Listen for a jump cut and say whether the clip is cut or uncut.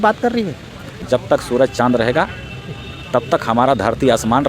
cut